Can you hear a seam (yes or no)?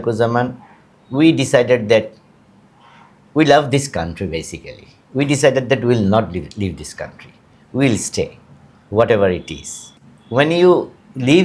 no